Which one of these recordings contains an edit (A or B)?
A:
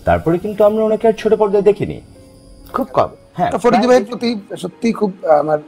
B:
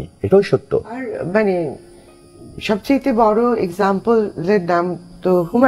A